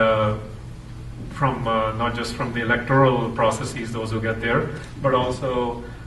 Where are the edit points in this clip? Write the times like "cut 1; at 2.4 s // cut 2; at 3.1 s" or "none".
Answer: cut 1; at 2.4 s